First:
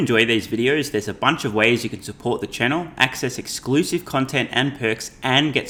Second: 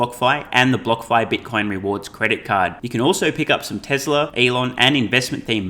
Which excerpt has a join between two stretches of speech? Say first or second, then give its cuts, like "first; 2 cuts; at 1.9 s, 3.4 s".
second; 1 cut; at 4.3 s